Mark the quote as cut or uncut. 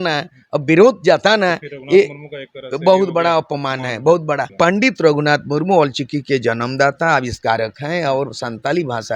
cut